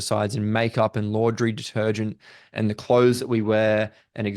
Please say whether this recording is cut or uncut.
uncut